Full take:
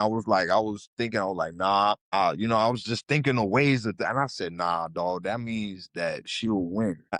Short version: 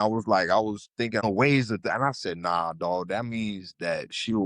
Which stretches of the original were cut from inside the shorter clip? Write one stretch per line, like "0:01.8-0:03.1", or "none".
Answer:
0:01.2-0:03.4

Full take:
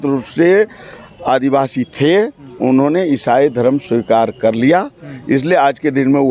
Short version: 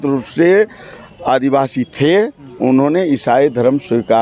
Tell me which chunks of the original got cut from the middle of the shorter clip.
none

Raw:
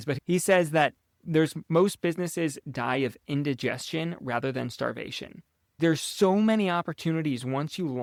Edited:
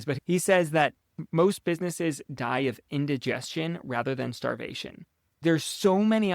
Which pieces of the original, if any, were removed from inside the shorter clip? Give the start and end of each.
0:01.2-0:01.6

